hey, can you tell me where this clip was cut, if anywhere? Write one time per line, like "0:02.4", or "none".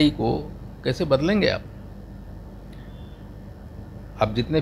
none